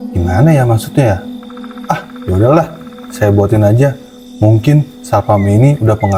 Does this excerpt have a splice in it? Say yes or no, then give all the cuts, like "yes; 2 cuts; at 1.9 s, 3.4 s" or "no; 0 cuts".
no; 0 cuts